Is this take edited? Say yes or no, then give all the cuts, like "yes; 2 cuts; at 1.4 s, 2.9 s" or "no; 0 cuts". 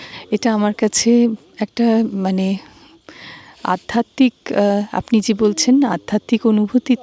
no; 0 cuts